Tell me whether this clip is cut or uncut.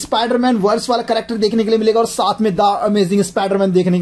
uncut